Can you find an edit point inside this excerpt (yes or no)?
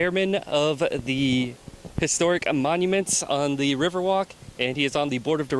no